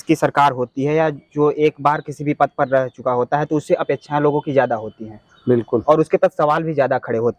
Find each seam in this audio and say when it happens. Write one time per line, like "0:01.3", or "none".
none